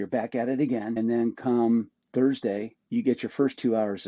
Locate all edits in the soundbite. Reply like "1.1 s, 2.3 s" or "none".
1.0 s, 2.7 s